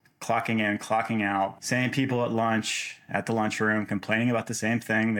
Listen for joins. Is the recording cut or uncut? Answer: cut